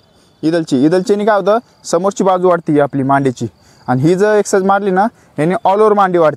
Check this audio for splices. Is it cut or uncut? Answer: uncut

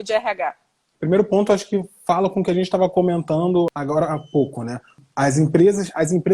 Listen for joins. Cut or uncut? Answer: cut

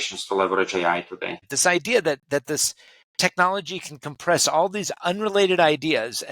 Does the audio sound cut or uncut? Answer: cut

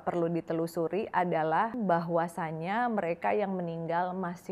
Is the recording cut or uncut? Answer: cut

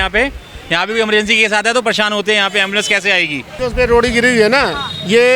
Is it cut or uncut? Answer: cut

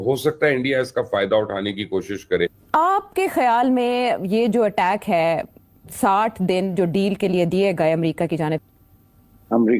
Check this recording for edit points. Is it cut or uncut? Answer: cut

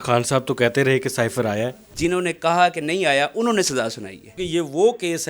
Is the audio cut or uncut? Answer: cut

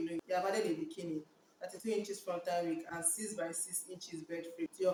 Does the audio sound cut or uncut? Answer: uncut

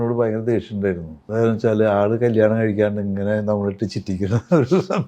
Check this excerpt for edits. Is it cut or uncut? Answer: cut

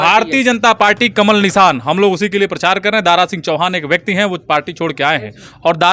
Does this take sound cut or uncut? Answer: uncut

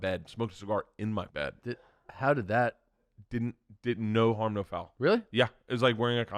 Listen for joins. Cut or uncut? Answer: cut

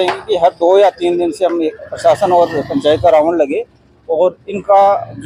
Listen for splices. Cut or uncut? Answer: uncut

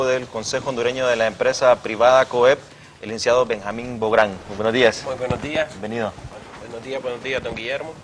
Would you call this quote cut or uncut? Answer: cut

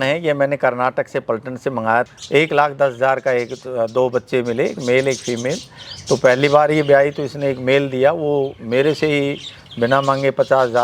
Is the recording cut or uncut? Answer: cut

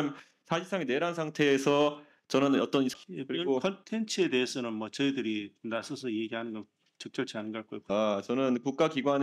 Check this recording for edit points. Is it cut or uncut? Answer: cut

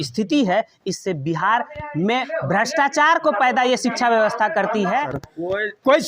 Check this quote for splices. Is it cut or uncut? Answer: cut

